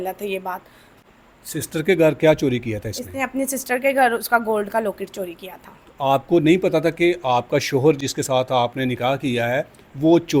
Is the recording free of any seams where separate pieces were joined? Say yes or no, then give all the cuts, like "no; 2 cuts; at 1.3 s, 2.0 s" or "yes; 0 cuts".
yes; 0 cuts